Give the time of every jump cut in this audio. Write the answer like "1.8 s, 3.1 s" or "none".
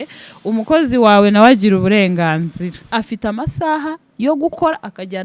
2.9 s